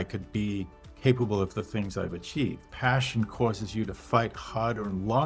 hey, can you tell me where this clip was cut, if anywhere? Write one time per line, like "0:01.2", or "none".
0:02.6